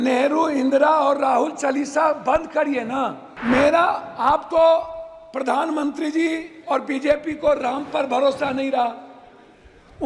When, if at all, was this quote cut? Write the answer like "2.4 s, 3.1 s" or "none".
3.3 s